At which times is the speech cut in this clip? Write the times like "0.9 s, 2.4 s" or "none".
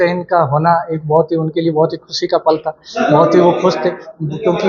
none